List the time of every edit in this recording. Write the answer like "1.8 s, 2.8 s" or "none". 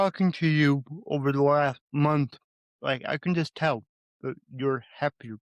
1.8 s